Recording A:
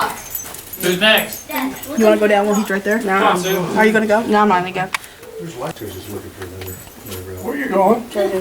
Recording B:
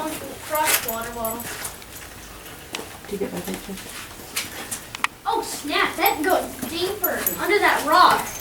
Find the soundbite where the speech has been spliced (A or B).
A